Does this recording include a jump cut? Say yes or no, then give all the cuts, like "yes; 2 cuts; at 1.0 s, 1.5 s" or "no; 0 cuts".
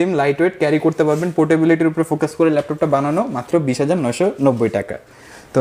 no; 0 cuts